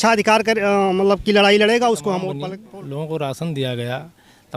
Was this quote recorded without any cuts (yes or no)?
no